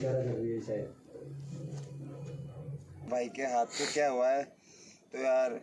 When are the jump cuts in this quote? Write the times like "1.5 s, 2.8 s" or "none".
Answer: 3.1 s